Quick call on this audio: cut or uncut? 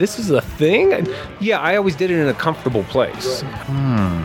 cut